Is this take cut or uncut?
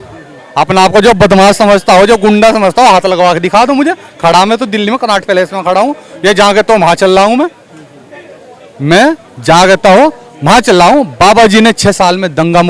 uncut